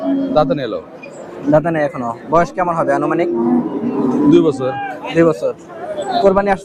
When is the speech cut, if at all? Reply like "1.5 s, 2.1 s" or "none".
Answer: none